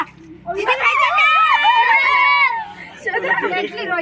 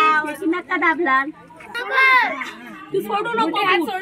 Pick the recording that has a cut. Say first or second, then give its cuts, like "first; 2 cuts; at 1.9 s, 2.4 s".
second; 1 cut; at 1.7 s